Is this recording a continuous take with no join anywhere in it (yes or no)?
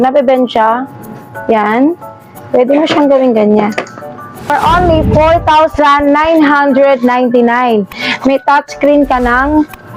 no